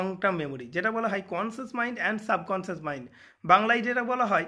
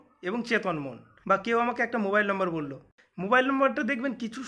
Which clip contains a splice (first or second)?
second